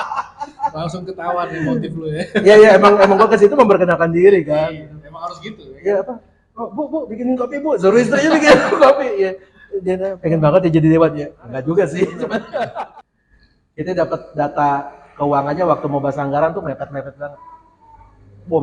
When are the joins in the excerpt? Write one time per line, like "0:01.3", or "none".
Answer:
0:12.9